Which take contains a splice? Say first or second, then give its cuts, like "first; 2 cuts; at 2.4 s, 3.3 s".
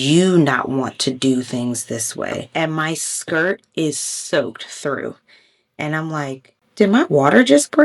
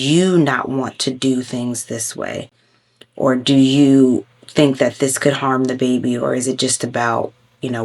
first; 2 cuts; at 2.4 s, 6.6 s